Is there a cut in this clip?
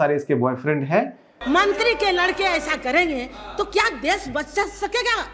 yes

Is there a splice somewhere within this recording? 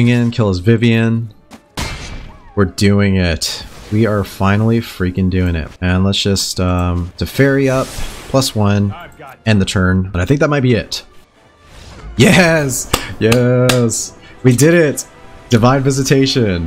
yes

